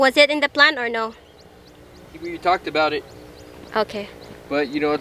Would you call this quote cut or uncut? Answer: uncut